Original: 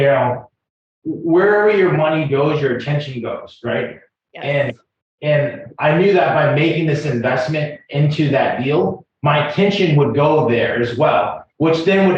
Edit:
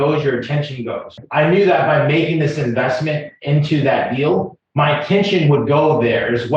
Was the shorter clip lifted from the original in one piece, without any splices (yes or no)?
no